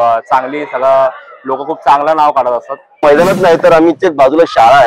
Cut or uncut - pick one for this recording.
cut